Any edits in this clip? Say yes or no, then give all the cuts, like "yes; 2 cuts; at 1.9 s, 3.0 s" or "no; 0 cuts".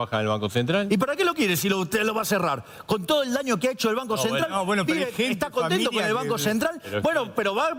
no; 0 cuts